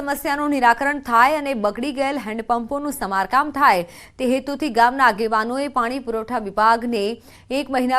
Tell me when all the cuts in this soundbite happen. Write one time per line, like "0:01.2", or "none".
0:06.5

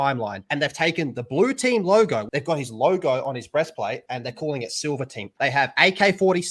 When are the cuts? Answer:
0:02.3
0:05.3

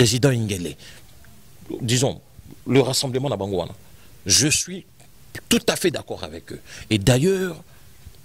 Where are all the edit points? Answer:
none

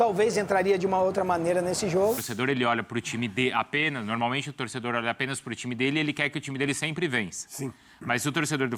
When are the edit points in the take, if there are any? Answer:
0:02.3

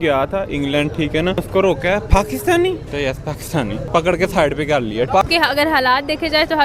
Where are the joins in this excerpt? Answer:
0:01.4
0:02.9
0:03.9
0:05.1

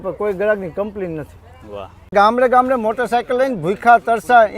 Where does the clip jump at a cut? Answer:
0:02.1

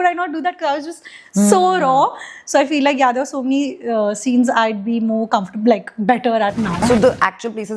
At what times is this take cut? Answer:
0:06.8

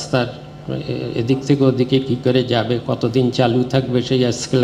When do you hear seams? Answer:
none

